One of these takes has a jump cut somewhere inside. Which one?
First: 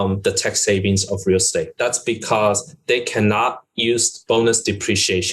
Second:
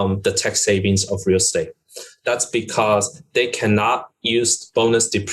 first; 1 cut; at 1.7 s

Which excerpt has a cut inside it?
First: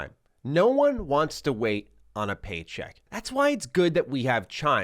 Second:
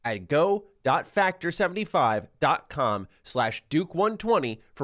first; 1 cut; at 3.0 s

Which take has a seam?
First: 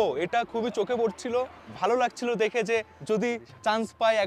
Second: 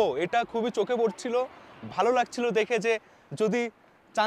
first; 2 cuts; at 1.6 s, 3.2 s

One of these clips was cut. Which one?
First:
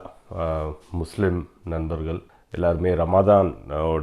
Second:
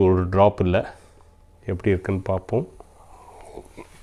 first; 1 cut; at 2.4 s

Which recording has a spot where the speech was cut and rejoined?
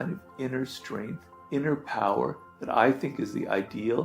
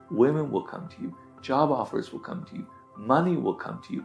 first; 1 cut; at 1.3 s

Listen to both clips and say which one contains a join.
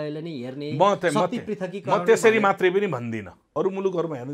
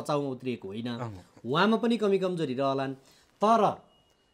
first; 1 cut; at 3.4 s

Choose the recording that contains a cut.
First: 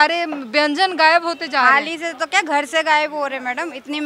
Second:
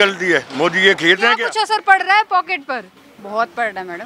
second; 1 cut; at 1.4 s

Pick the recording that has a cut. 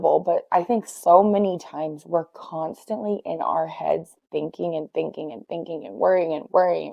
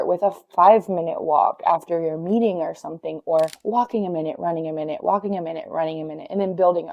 second; 1 cut; at 3.6 s

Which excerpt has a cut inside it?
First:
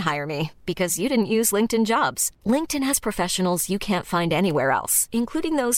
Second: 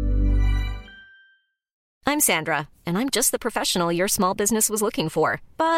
second; 1 cut; at 1.8 s

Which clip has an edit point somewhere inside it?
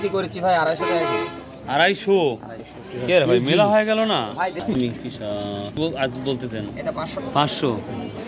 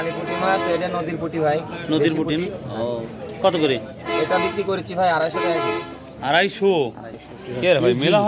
first; 1 cut; at 4.8 s

